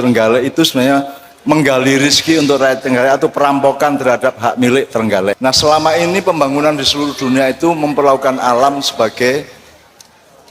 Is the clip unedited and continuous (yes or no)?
no